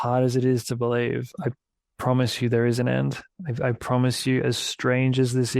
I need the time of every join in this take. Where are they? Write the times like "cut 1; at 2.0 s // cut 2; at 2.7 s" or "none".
cut 1; at 1.3 s